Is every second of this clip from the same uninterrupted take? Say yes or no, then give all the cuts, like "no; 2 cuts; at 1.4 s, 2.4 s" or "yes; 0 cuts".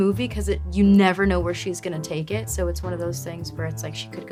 yes; 0 cuts